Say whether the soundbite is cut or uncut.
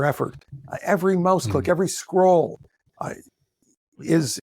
uncut